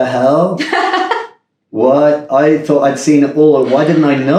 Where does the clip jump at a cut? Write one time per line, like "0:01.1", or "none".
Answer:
none